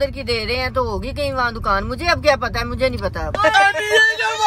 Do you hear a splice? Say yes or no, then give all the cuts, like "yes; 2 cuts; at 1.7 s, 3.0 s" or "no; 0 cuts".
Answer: yes; 1 cut; at 3.4 s